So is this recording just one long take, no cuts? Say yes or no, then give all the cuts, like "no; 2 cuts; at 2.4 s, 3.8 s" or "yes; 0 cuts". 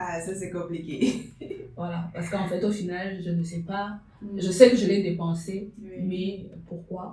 yes; 0 cuts